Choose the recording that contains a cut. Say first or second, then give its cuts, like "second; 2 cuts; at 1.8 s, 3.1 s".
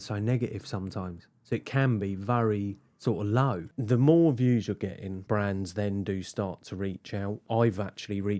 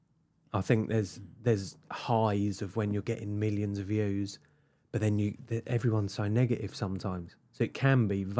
first; 3 cuts; at 3.6 s, 5.1 s, 7.4 s